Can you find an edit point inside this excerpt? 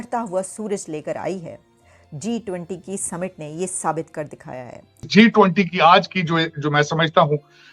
yes; 1 cut; at 5.1 s

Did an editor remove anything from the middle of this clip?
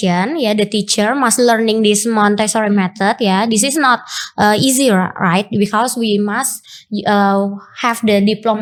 no; 0 cuts

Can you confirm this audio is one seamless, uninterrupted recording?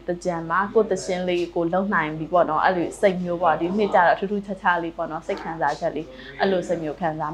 yes; 0 cuts

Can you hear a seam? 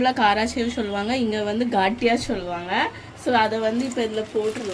no; 0 cuts

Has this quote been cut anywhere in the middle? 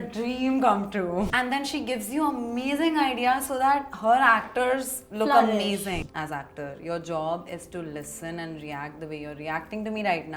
yes; 2 cuts; at 1.3 s, 6.0 s

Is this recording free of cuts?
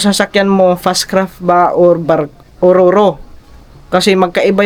yes; 0 cuts

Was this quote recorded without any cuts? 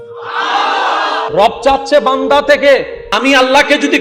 no; 2 cuts; at 1.3 s, 3.0 s

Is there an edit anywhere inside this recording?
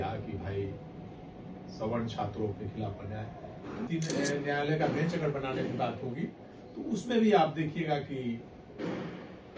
yes; 1 cut; at 3.9 s

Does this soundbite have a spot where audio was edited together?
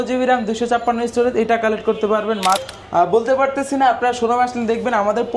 yes; 1 cut; at 2.6 s

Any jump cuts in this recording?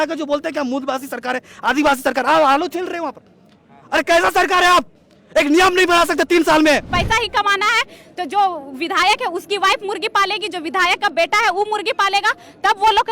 yes; 1 cut; at 6.9 s

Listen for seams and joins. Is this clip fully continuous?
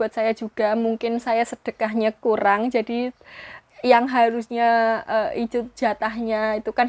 yes; 0 cuts

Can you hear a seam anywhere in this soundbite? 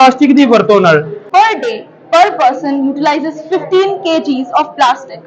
yes; 1 cut; at 1.2 s

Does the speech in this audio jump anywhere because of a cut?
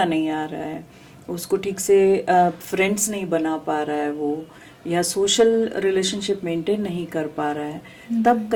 no; 0 cuts

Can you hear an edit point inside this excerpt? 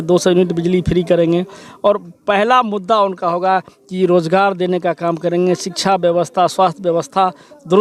no; 0 cuts

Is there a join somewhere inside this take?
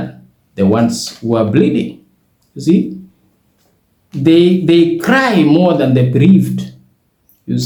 no; 0 cuts

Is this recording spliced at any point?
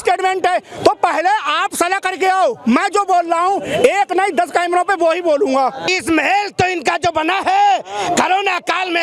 yes; 1 cut; at 5.9 s

